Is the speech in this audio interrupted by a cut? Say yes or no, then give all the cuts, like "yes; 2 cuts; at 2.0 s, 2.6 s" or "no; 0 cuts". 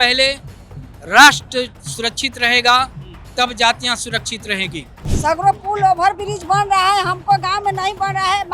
yes; 1 cut; at 5.0 s